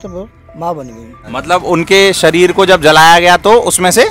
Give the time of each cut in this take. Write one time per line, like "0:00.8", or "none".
0:01.2